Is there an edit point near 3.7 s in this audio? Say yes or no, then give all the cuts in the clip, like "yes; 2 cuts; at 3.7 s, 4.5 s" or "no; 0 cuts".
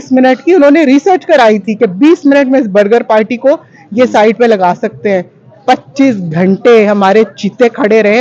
no; 0 cuts